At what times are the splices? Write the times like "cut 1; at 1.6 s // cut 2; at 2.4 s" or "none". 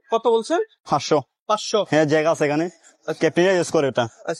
none